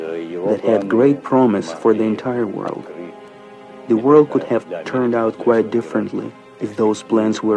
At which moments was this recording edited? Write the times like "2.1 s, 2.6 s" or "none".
2.8 s